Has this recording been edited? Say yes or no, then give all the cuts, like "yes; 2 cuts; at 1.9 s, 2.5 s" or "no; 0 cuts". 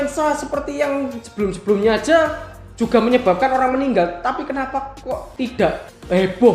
yes; 1 cut; at 5.3 s